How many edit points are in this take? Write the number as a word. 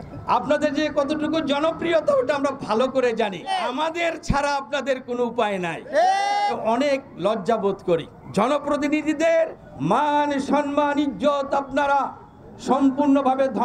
four